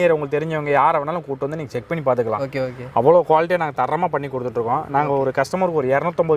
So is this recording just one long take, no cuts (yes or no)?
yes